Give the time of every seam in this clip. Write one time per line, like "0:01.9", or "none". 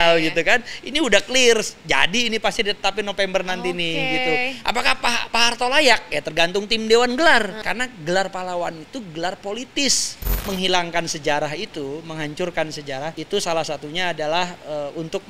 0:07.6
0:10.3
0:13.2